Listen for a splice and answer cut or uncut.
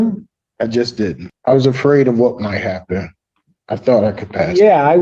cut